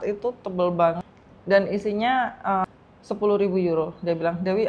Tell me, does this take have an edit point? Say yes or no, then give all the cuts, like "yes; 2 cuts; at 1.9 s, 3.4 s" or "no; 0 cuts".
yes; 2 cuts; at 1.1 s, 2.6 s